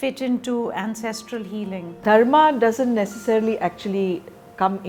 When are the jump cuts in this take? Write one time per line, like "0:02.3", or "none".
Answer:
none